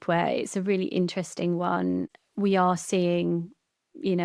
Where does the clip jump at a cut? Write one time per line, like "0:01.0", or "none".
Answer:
0:02.1